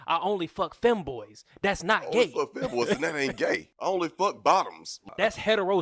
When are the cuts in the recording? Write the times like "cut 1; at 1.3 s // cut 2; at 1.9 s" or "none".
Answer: cut 1; at 3.9 s // cut 2; at 5.0 s